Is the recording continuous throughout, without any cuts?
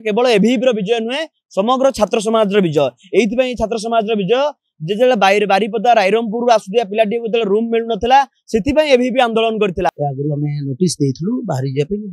no; 1 cut; at 10.0 s

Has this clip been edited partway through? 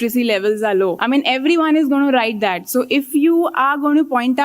yes; 1 cut; at 1.0 s

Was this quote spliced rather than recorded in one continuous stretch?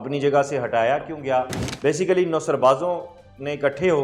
yes; 1 cut; at 1.7 s

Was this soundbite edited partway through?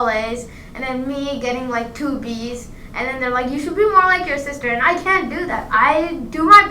yes; 1 cut; at 5.7 s

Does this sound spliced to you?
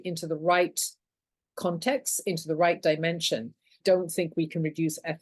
yes; 1 cut; at 3.8 s

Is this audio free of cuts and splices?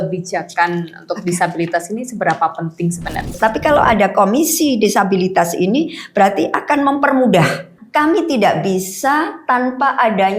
no; 2 cuts; at 3.3 s, 7.7 s

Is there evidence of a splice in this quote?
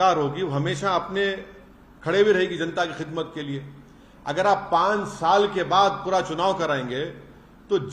no; 0 cuts

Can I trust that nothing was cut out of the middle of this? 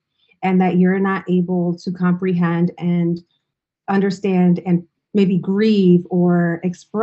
no; 1 cut; at 4.9 s

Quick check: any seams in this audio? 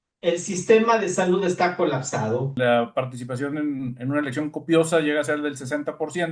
yes; 1 cut; at 2.5 s

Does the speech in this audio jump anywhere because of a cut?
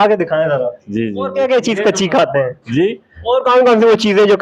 yes; 1 cut; at 1.2 s

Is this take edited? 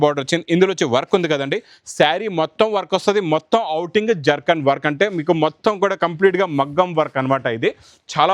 no; 0 cuts

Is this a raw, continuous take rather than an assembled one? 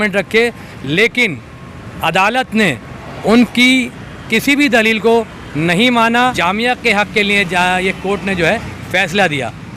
no; 1 cut; at 6.4 s

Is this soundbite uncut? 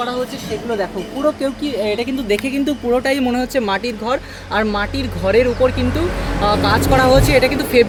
yes; 0 cuts

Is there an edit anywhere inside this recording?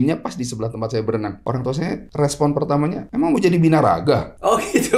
yes; 1 cut; at 1.4 s

